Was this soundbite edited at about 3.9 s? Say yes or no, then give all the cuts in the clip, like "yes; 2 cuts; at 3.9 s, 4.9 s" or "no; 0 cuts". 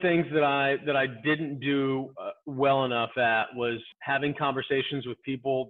yes; 1 cut; at 3.9 s